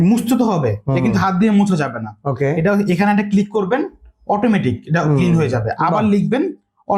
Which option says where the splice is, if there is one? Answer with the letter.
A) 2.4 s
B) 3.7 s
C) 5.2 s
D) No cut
D